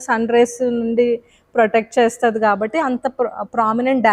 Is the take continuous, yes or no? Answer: yes